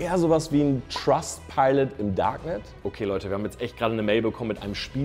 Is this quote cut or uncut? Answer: cut